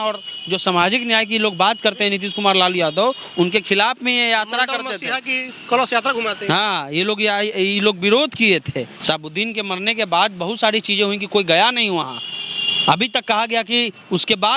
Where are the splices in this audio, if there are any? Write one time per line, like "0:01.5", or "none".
0:08.9